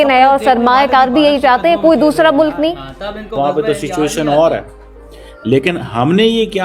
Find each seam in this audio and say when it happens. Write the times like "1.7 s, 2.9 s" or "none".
3.3 s